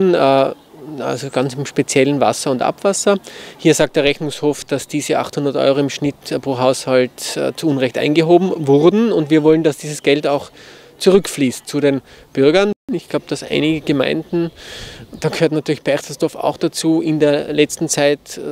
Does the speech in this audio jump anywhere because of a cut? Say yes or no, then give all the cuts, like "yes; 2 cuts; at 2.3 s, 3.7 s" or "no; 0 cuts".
yes; 1 cut; at 12.8 s